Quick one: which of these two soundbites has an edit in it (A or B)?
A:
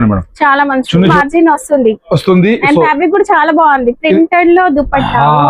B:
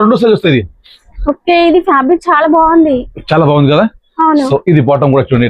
A